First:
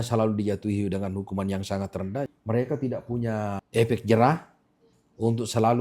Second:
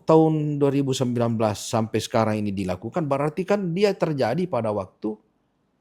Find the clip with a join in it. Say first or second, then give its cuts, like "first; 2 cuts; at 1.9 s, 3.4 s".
first; 2 cuts; at 2.3 s, 3.6 s